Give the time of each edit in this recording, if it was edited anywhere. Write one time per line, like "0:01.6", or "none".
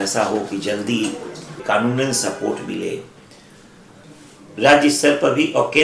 0:01.6
0:03.9